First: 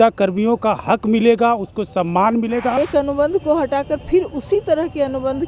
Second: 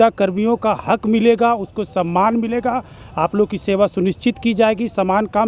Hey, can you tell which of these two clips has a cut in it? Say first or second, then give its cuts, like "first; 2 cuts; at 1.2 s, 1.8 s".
first; 1 cut; at 2.8 s